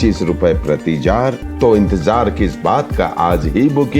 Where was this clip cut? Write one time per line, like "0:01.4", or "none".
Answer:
0:01.4